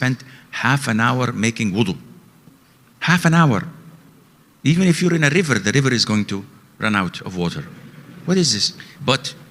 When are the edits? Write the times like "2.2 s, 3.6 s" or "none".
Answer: none